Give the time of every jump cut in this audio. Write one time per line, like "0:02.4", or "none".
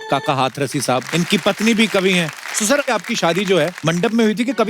0:01.0
0:02.9
0:03.8